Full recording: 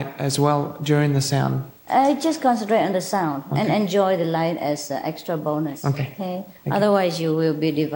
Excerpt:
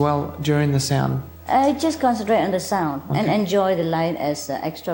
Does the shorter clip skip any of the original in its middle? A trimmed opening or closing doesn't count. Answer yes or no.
no